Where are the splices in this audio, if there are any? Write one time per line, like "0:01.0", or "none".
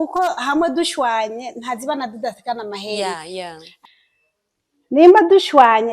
0:03.7